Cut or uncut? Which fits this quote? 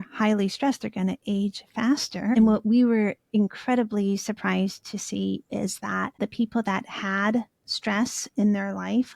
cut